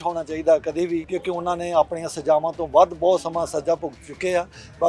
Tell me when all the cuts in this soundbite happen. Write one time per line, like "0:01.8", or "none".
0:01.1